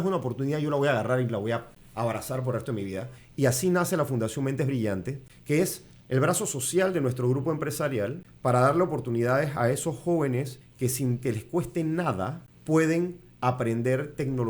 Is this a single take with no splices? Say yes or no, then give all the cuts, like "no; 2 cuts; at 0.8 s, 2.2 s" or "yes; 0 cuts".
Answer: no; 6 cuts; at 1.8 s, 3.2 s, 5.6 s, 8.3 s, 10.6 s, 12.5 s